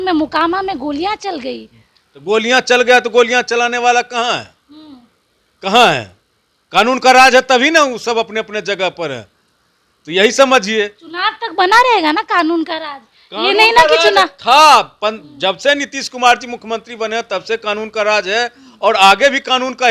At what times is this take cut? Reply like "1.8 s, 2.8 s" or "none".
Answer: none

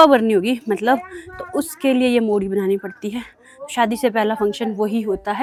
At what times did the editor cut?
none

